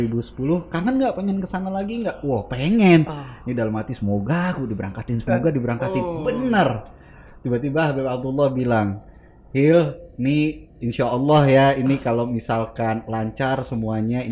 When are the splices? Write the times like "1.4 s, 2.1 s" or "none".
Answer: none